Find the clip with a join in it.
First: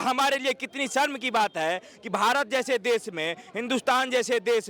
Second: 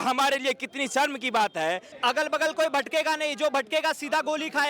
second; 1 cut; at 1.9 s

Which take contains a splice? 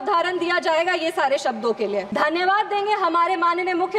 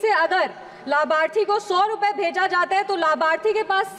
first; 1 cut; at 2.1 s

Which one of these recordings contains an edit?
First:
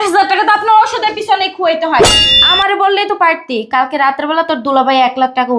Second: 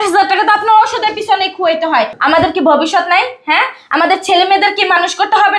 first; 1 cut; at 2.1 s

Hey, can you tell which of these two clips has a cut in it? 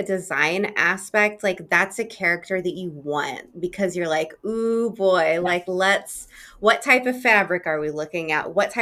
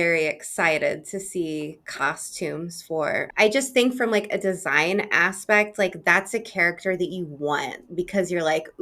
second; 1 cut; at 3.3 s

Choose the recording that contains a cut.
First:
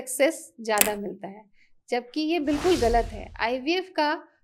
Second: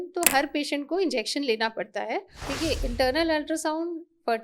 second; 1 cut; at 2.4 s

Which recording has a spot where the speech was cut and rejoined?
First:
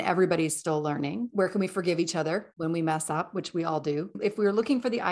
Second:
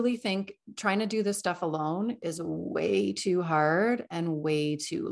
first; 3 cuts; at 1.3 s, 2.5 s, 4.2 s

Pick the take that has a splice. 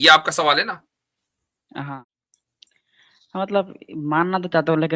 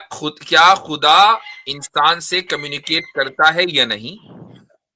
first; 1 cut; at 2.0 s

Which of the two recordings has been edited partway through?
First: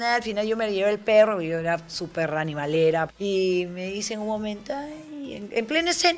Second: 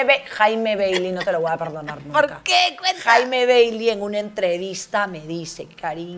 first; 1 cut; at 3.1 s

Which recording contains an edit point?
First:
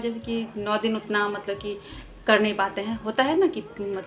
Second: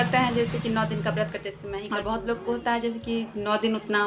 second; 1 cut; at 1.7 s

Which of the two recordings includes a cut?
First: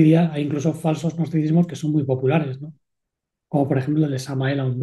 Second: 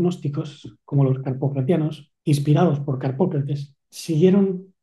second; 1 cut; at 2.1 s

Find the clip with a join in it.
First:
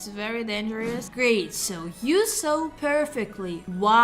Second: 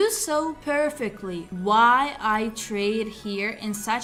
first; 1 cut; at 1.1 s

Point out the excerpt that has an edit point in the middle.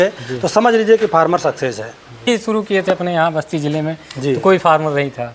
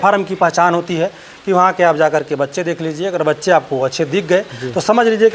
first; 1 cut; at 2.3 s

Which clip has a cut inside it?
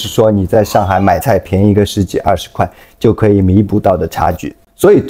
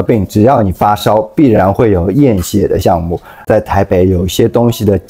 second; 1 cut; at 3.4 s

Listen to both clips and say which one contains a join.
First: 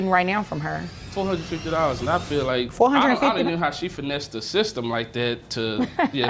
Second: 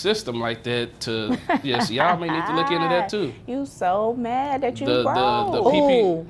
first; 2 cuts; at 0.9 s, 2.7 s

